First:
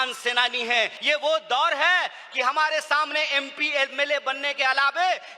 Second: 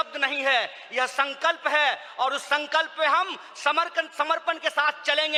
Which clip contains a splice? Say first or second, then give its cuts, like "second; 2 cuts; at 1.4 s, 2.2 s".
first; 1 cut; at 1.0 s